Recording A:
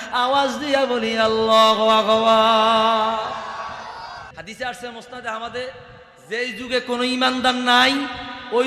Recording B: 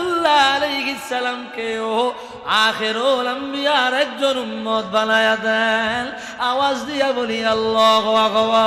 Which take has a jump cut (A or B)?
A